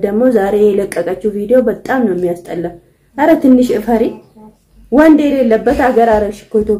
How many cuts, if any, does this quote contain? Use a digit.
0